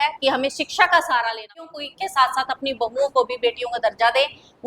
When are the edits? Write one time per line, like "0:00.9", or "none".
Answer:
0:01.8